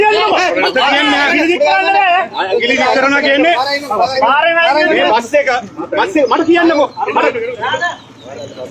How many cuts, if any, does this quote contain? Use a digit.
0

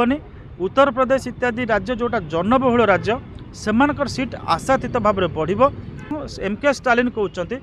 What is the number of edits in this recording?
1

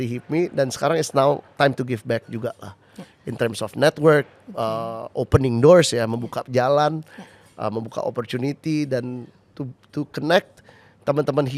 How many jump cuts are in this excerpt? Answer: 0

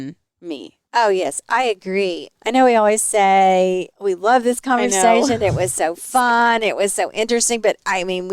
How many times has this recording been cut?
1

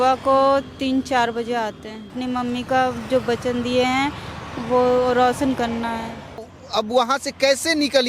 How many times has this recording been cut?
2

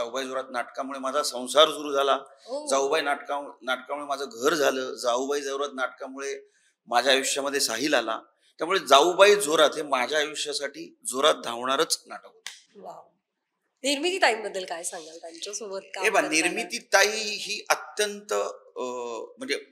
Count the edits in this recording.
0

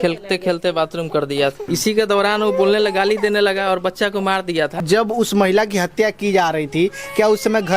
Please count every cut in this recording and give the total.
2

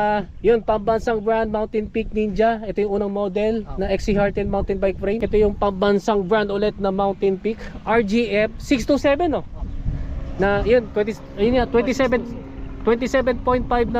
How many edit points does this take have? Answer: 1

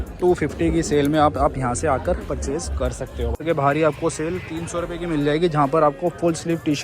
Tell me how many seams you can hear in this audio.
1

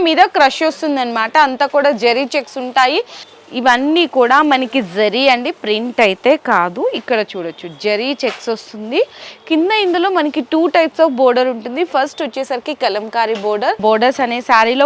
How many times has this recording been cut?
2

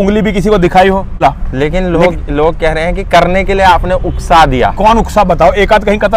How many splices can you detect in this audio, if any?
1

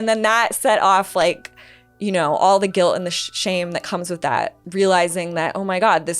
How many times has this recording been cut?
1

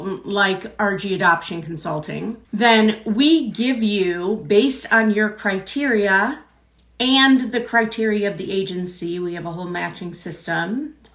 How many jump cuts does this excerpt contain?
1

